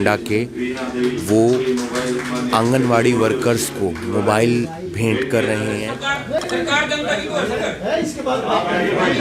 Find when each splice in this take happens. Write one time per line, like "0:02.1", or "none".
0:05.9